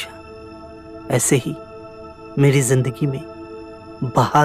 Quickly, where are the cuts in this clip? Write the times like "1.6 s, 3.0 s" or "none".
none